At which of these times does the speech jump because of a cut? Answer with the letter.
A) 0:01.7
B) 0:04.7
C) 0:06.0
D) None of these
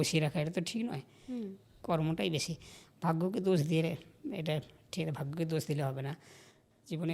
A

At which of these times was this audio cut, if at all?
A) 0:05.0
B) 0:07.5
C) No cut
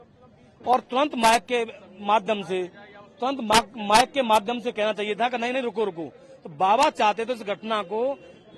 C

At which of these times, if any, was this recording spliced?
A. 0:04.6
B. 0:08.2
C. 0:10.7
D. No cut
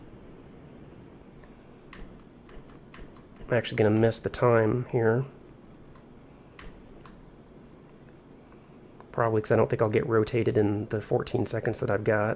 A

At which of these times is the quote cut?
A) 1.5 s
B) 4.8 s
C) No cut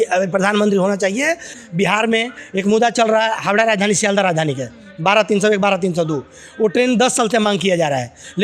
A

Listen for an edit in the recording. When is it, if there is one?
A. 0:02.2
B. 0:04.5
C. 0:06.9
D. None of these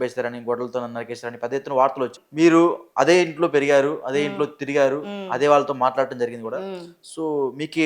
A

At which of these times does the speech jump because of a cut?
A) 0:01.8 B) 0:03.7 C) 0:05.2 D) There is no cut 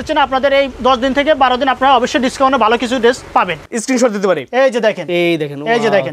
B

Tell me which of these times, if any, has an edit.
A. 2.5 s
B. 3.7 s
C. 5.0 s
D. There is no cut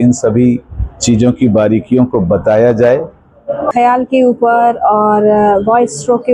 B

